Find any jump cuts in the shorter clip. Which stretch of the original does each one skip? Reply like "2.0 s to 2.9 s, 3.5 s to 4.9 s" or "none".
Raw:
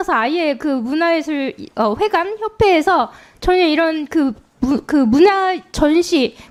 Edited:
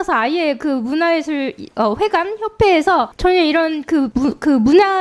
3.1 s to 3.3 s, 4.3 s to 4.6 s